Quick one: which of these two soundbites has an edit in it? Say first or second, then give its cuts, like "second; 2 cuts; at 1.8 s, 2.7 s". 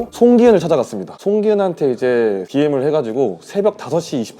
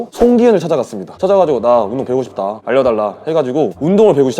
second; 1 cut; at 1.0 s